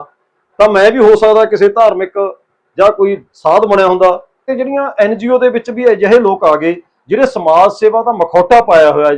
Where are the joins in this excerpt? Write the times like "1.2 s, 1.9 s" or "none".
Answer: 4.5 s